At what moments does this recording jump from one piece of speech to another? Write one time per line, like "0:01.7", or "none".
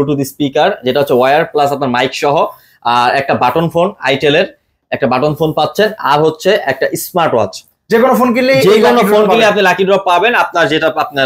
none